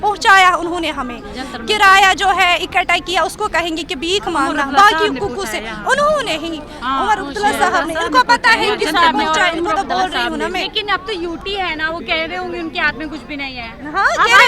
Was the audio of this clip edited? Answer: no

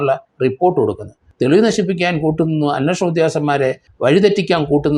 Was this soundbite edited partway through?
yes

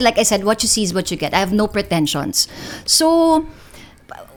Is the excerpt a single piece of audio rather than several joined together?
yes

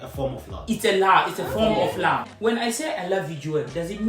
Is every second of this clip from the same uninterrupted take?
no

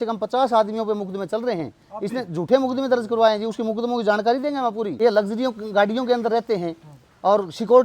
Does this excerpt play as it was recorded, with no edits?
no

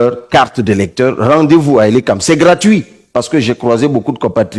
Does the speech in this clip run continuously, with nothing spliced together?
yes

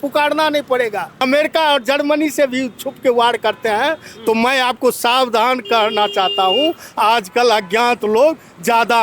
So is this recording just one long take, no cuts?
no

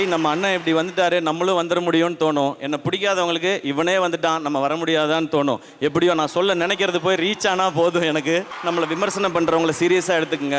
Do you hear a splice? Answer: yes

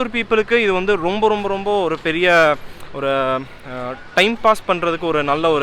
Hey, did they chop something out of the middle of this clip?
no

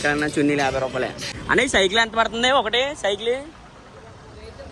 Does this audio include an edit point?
yes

